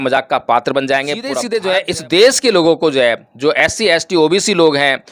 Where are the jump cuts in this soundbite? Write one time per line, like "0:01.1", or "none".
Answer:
0:01.3